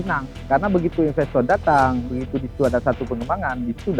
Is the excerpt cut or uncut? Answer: uncut